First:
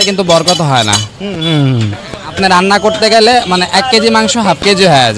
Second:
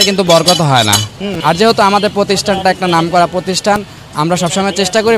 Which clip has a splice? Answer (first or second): second